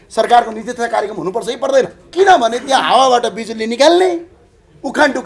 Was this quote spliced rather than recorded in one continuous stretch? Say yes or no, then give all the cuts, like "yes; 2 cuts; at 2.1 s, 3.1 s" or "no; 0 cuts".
yes; 1 cut; at 2.0 s